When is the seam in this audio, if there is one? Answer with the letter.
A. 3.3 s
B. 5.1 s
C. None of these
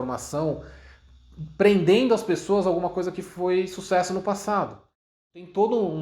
B